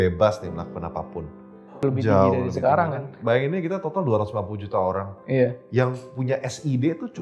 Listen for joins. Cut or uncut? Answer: cut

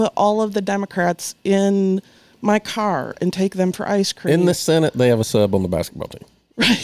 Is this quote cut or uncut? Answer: uncut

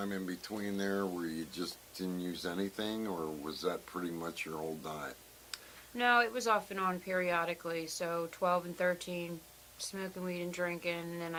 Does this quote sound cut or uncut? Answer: uncut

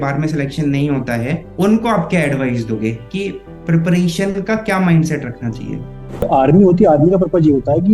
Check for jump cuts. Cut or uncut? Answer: cut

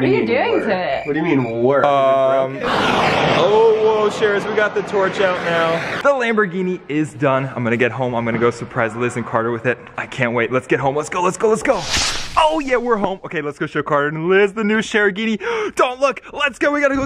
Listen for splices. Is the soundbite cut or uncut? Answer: cut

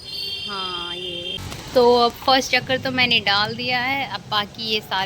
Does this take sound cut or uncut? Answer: cut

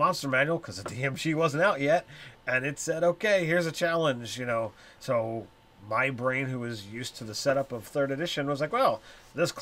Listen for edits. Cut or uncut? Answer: uncut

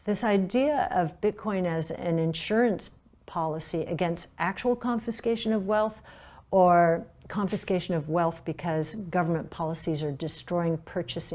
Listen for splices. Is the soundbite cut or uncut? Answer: uncut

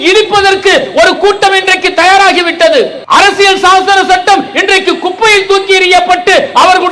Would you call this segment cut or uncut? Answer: cut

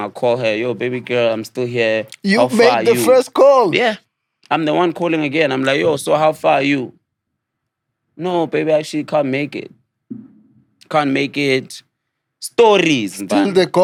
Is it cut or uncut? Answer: uncut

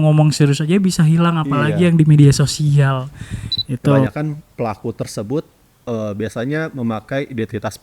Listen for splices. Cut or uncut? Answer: cut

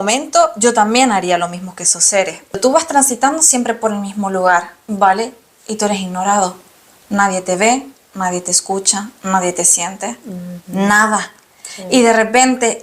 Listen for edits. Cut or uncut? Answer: cut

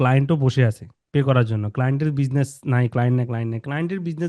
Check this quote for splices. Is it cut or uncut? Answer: uncut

